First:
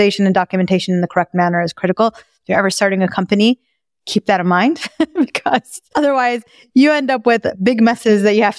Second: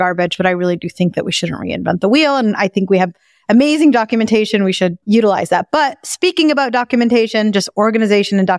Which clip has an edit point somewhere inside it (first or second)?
second